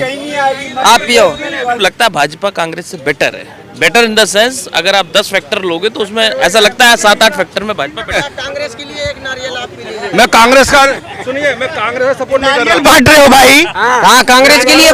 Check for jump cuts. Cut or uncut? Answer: cut